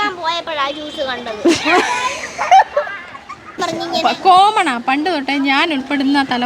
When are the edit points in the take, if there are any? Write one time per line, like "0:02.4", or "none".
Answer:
0:03.7